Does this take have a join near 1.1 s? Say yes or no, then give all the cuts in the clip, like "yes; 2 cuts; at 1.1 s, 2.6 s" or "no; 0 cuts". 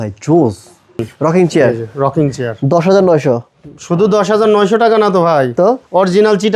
yes; 1 cut; at 1.1 s